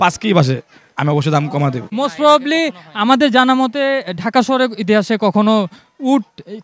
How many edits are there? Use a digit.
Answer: 1